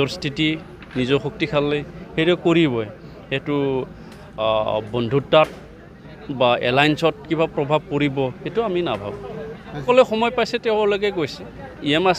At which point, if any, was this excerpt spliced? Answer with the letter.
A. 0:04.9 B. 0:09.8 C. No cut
B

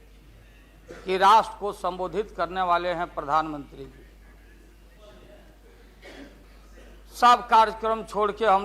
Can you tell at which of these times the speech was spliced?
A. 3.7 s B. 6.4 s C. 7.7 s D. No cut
B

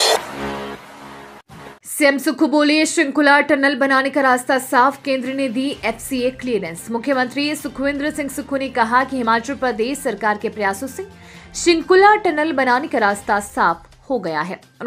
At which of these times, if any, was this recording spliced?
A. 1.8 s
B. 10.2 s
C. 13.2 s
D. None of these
A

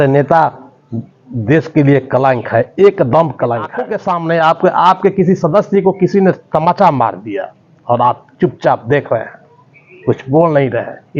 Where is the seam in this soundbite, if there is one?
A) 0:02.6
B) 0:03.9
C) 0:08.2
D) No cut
B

